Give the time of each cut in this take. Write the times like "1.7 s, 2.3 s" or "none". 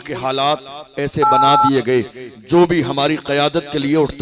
none